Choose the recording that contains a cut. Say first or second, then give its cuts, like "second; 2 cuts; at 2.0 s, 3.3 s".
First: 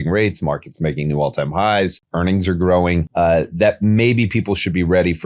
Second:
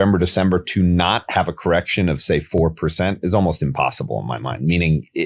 first; 2 cuts; at 2.0 s, 3.1 s